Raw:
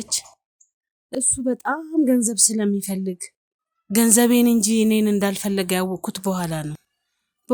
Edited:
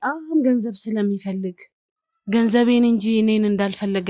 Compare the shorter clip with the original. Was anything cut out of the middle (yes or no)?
no